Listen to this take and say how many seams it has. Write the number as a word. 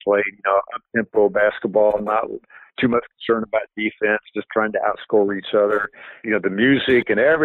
one